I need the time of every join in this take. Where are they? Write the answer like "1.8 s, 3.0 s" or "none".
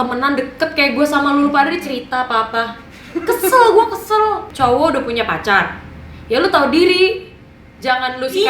4.5 s